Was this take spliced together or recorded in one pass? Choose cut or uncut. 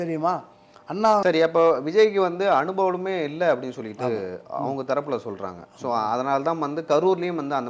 cut